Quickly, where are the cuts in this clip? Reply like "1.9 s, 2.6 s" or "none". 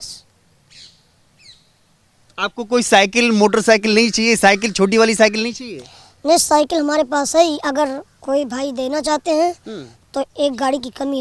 none